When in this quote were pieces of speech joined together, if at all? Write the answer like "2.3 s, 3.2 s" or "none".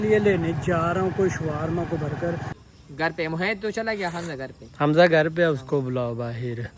2.5 s

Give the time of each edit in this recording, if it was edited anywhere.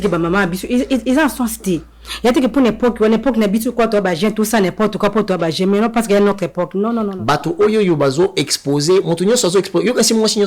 7.1 s

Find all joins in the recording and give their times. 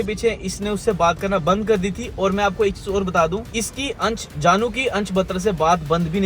none

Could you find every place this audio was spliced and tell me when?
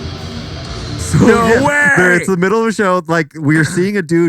1.0 s

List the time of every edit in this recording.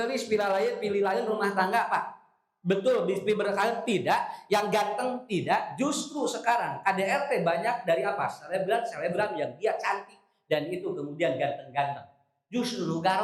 none

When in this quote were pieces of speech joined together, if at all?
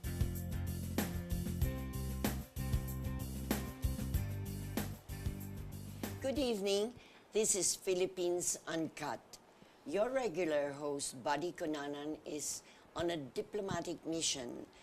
12.0 s

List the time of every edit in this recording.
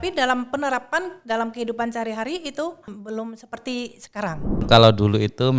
3.0 s, 4.6 s

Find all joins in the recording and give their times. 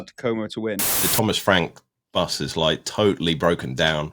1.0 s

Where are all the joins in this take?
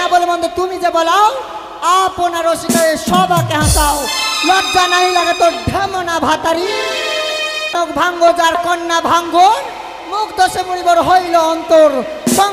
7.8 s

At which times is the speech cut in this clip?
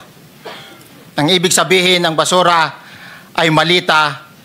none

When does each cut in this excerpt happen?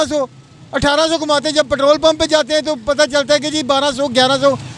none

